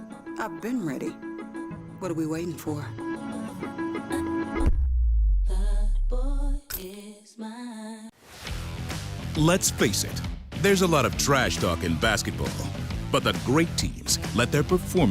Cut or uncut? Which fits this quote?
cut